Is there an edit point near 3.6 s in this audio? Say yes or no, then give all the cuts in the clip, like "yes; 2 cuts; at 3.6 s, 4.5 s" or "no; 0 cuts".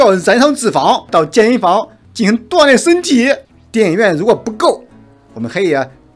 yes; 2 cuts; at 1.1 s, 3.6 s